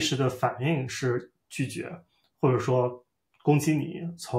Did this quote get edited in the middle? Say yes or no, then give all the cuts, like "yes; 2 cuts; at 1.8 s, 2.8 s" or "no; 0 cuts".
no; 0 cuts